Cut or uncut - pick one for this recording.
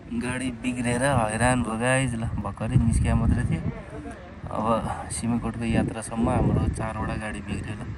uncut